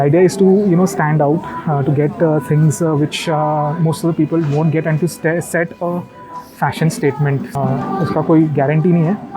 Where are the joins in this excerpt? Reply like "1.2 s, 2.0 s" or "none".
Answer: 7.5 s